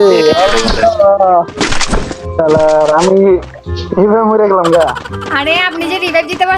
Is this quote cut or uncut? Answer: uncut